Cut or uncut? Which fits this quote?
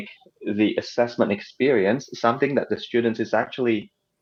uncut